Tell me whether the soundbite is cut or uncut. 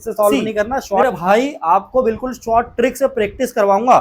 cut